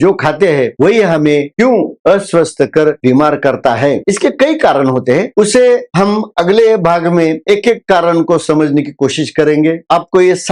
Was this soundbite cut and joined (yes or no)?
no